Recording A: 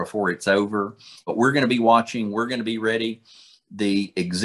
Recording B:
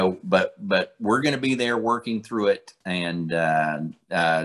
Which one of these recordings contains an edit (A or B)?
A